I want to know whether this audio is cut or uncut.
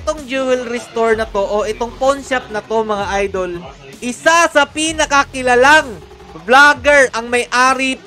uncut